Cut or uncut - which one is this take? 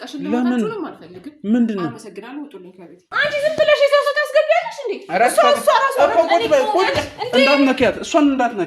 cut